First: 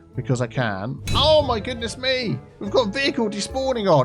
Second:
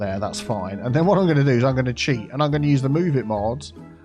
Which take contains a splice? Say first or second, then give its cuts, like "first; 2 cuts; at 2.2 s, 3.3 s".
first; 2 cuts; at 1.0 s, 2.5 s